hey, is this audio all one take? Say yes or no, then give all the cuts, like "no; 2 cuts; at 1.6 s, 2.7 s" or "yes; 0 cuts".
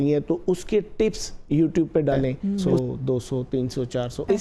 no; 1 cut; at 2.8 s